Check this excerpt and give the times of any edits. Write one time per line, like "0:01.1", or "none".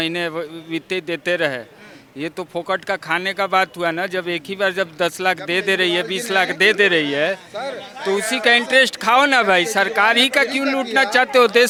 none